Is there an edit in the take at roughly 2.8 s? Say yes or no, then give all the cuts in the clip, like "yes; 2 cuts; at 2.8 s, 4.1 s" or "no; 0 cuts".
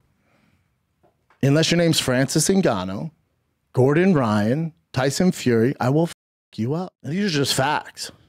no; 0 cuts